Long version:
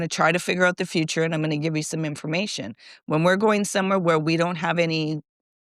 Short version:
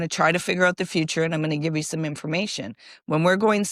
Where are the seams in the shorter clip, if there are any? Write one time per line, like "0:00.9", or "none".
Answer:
none